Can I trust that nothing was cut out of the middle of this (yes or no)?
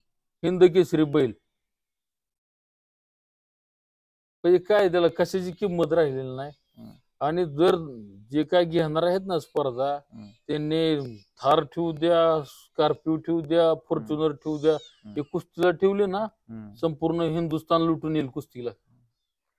yes